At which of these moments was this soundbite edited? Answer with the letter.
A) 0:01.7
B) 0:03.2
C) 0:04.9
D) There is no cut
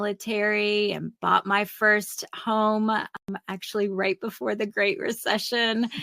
B